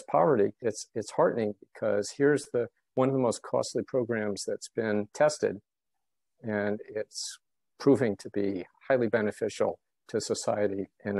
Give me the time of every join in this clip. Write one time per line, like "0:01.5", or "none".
0:08.7